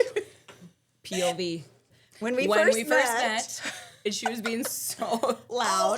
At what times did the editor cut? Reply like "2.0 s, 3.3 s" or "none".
2.0 s